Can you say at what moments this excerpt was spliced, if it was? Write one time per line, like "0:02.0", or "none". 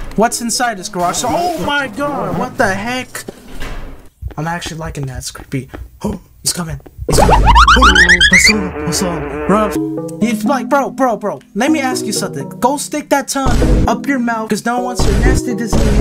0:04.0
0:09.8
0:11.4